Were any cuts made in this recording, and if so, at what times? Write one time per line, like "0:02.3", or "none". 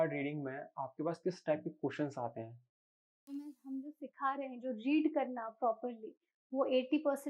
0:03.3